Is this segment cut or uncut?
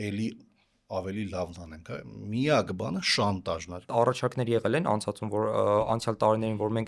cut